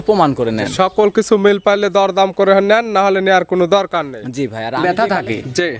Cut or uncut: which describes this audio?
cut